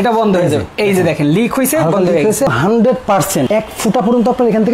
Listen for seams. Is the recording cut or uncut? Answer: cut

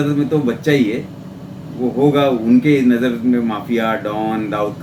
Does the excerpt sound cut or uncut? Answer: uncut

